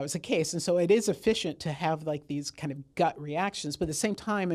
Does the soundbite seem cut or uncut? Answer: uncut